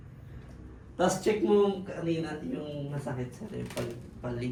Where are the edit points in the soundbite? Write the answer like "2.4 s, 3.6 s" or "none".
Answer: none